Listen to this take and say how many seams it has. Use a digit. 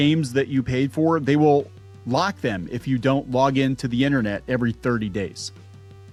0